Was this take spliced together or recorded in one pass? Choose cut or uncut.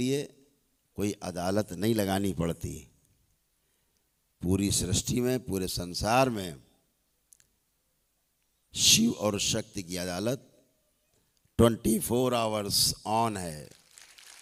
uncut